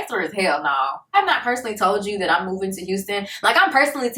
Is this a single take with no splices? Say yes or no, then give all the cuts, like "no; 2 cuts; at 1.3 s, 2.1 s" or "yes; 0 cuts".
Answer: no; 1 cut; at 1.1 s